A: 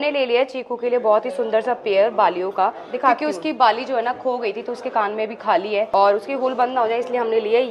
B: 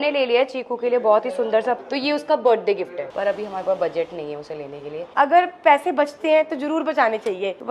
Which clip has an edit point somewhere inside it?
B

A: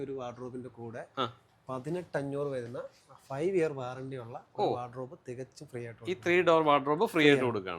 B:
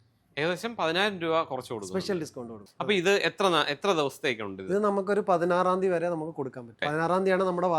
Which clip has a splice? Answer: B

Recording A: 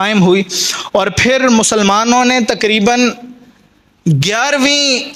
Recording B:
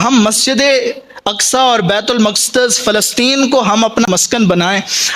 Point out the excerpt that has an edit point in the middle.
B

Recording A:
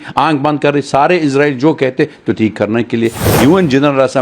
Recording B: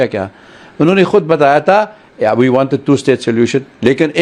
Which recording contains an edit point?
A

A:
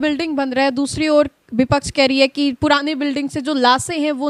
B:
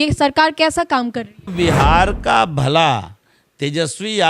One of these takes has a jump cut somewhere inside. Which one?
B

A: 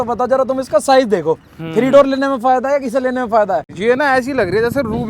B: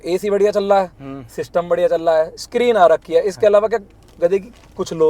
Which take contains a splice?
A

